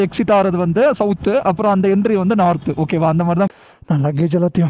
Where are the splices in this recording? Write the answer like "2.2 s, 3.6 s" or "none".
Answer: 3.5 s